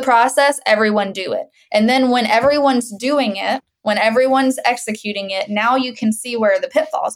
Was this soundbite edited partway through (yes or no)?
yes